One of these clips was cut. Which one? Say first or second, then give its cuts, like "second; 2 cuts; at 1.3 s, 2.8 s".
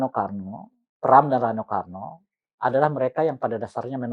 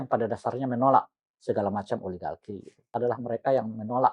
second; 1 cut; at 2.9 s